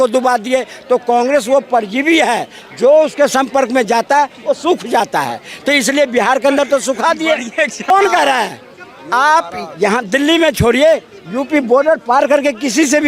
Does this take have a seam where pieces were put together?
yes; 1 cut; at 7.9 s

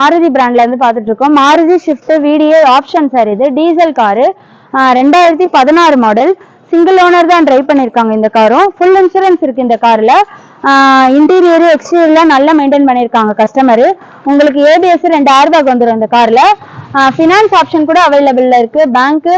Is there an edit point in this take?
no; 0 cuts

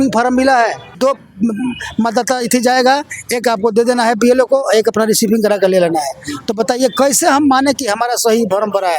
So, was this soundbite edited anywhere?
yes; 1 cut; at 0.9 s

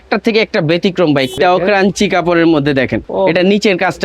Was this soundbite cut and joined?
yes; 2 cuts; at 1.3 s, 3.0 s

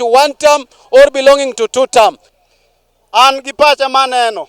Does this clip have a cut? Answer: yes; 1 cut; at 2.3 s

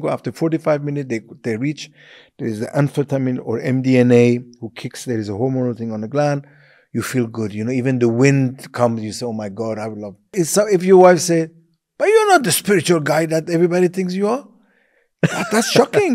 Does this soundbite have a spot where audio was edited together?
yes; 1 cut; at 10.3 s

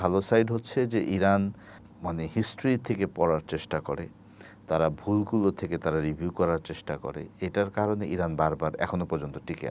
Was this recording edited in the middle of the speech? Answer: no; 0 cuts

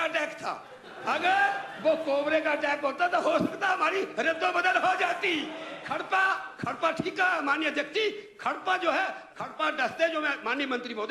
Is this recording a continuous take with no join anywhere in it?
yes; 0 cuts

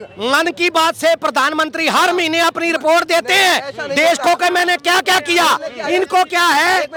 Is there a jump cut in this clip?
no; 0 cuts

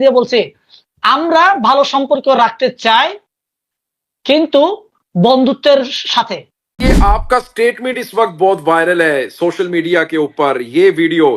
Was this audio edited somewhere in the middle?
yes; 1 cut; at 6.8 s

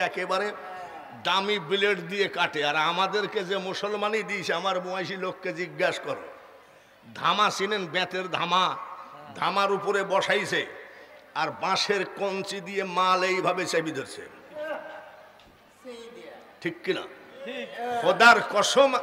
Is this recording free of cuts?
yes; 0 cuts

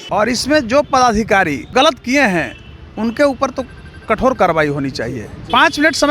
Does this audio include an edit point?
yes; 1 cut; at 1.6 s

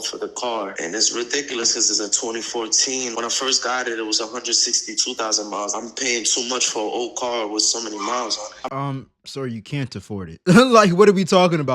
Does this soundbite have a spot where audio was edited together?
yes; 1 cut; at 8.7 s

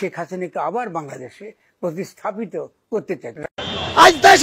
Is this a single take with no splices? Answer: yes; 0 cuts

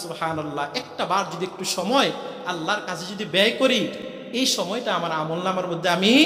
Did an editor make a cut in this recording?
no; 0 cuts

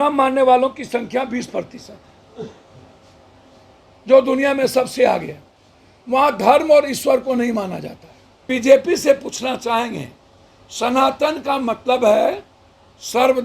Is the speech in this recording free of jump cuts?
no; 1 cut; at 8.5 s

